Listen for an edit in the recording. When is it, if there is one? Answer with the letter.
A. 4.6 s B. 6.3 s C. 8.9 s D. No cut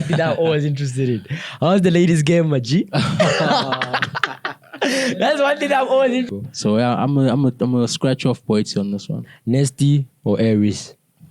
B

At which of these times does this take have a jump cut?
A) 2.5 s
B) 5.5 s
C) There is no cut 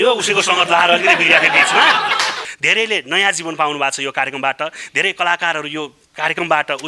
A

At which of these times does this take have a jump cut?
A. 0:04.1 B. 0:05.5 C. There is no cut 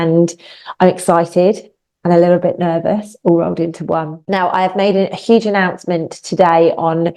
A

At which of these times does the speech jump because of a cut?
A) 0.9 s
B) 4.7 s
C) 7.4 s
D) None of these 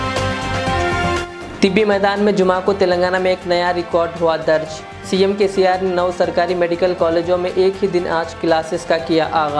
A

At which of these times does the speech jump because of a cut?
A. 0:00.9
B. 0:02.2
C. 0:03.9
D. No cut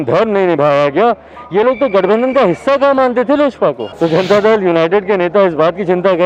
C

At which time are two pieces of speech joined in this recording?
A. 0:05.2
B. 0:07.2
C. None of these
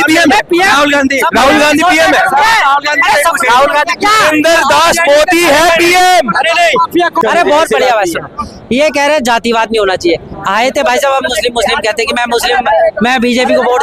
B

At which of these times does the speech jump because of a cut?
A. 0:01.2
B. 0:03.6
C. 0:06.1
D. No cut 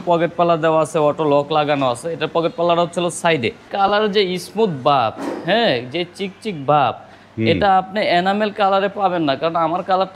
B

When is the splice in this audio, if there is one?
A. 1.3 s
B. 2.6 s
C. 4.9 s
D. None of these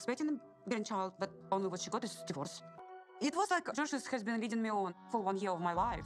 B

